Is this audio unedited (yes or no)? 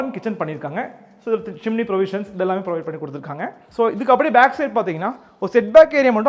no